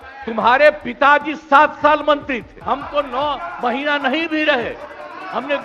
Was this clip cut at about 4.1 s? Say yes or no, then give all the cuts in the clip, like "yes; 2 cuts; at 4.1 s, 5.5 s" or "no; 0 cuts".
no; 1 cut; at 2.5 s